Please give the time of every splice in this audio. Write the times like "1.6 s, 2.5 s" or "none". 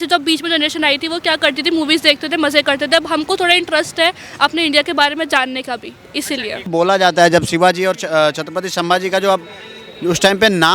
6.7 s